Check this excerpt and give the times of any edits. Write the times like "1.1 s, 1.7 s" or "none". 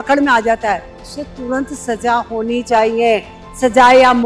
none